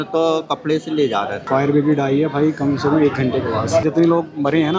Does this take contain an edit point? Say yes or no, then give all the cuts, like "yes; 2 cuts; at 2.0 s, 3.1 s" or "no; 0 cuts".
yes; 2 cuts; at 1.4 s, 3.8 s